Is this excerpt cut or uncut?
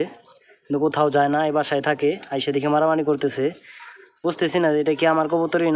uncut